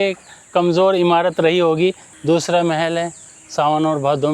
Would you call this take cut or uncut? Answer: uncut